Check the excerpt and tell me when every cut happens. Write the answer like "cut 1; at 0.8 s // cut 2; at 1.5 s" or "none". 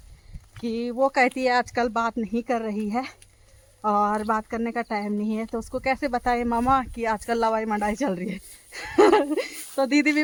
none